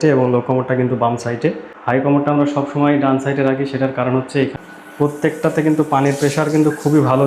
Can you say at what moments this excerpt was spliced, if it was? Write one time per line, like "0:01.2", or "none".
0:01.7
0:04.5